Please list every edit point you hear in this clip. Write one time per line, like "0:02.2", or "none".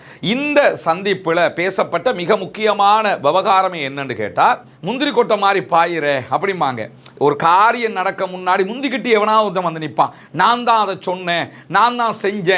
0:04.7